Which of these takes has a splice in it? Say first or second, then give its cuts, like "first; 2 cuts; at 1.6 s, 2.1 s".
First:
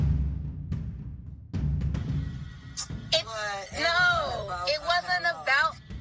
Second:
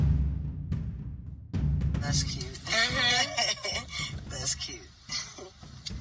second; 1 cut; at 2.0 s